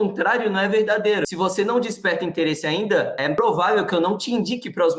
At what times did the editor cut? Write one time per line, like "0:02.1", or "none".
0:01.3